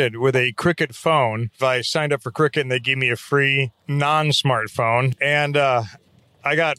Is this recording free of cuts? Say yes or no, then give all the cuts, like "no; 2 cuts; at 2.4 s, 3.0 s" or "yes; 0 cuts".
no; 3 cuts; at 1.5 s, 3.8 s, 5.1 s